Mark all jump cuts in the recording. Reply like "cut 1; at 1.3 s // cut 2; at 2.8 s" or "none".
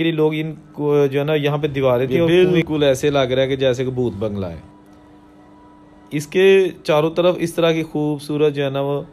cut 1; at 2.3 s